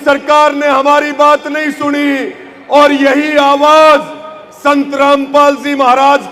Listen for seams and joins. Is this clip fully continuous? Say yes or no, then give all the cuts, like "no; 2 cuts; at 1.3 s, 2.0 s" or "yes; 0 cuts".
yes; 0 cuts